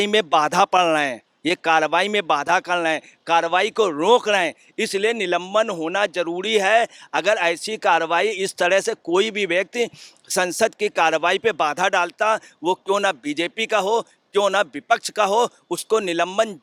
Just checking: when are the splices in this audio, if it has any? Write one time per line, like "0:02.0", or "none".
none